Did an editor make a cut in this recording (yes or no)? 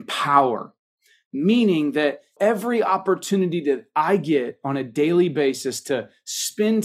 yes